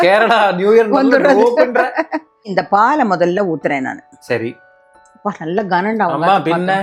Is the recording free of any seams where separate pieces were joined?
yes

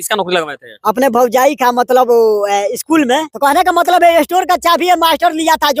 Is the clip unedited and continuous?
no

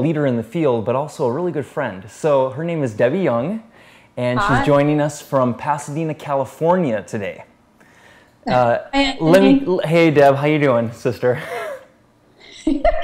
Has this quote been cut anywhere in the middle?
no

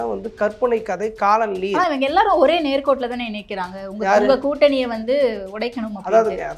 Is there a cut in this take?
no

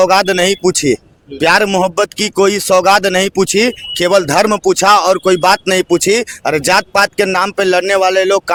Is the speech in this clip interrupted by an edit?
no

